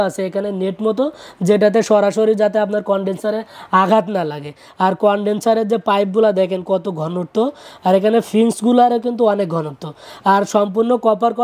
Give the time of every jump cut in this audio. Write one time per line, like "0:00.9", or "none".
none